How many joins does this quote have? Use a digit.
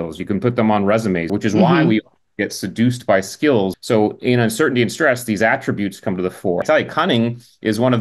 3